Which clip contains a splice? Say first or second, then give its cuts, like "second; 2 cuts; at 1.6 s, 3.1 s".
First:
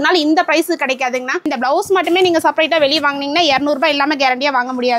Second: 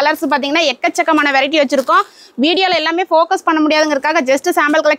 first; 1 cut; at 1.5 s